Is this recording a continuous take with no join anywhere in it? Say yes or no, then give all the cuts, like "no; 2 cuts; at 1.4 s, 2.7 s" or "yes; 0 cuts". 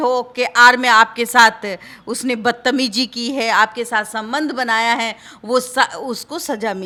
yes; 0 cuts